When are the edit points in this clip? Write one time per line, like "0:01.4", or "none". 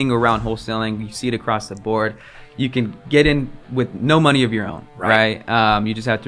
none